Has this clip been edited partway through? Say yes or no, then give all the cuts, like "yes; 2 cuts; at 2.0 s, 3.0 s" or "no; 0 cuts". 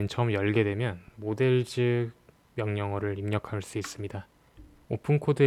no; 0 cuts